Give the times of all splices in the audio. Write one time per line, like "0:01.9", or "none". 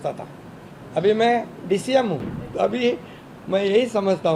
0:02.4